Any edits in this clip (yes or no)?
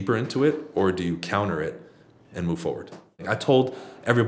yes